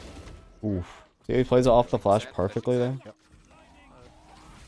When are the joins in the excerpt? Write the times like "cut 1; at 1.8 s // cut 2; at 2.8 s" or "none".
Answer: none

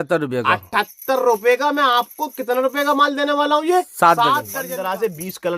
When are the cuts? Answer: cut 1; at 4.5 s

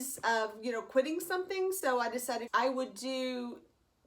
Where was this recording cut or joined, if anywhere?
cut 1; at 2.4 s

